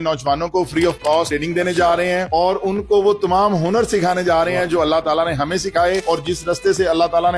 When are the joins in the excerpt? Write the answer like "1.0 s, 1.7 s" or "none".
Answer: none